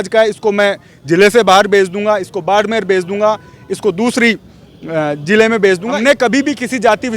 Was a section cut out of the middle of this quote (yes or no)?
yes